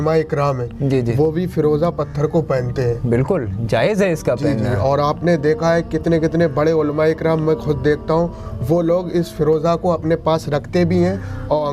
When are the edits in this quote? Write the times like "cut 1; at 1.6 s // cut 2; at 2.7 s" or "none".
none

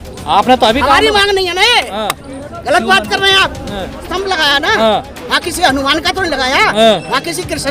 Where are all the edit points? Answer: cut 1; at 4.1 s

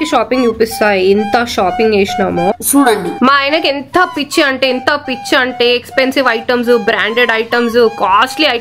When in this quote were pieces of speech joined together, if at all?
none

